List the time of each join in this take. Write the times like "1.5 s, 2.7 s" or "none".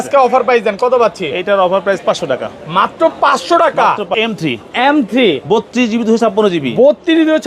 4.1 s

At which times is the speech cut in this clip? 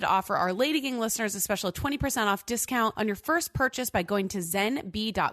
2.9 s

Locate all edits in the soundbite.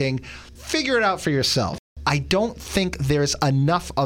1.9 s

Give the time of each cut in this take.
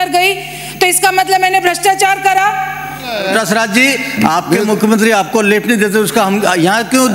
3.2 s

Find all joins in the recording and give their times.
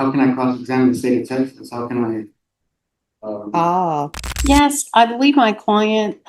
4.2 s

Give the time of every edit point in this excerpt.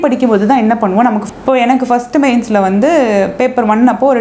1.2 s

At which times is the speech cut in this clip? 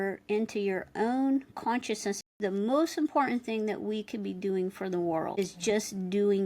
2.3 s

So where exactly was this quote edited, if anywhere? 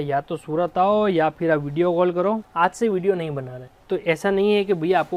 none

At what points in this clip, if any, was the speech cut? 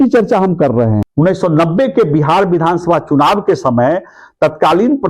1.0 s

